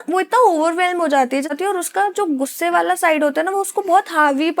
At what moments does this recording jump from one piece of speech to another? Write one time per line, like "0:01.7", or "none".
0:01.5